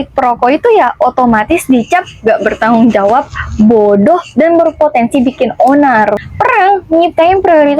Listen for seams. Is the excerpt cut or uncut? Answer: cut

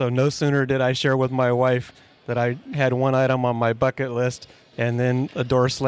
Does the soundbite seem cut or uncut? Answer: uncut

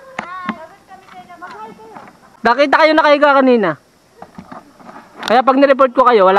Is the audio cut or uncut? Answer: cut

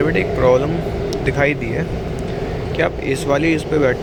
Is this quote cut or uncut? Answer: uncut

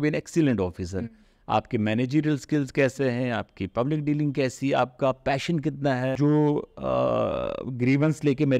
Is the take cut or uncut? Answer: cut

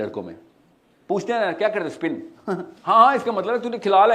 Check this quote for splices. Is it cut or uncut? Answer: cut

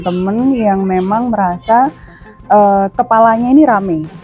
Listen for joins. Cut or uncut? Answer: uncut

